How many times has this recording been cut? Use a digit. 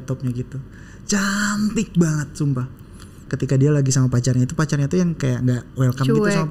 1